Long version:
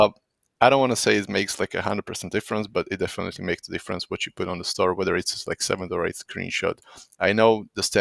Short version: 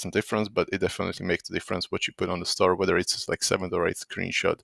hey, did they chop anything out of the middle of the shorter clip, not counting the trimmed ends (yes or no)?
no